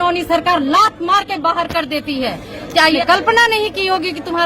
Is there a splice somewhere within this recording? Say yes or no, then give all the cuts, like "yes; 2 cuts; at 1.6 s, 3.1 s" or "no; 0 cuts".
yes; 1 cut; at 3.0 s